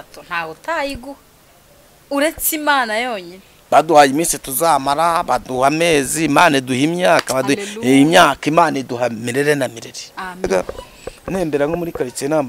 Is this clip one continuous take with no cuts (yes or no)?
no